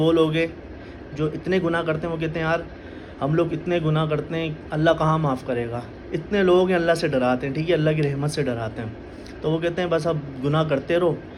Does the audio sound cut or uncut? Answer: uncut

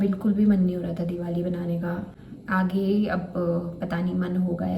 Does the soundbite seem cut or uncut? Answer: uncut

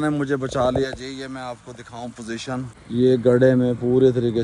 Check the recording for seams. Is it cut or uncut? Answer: cut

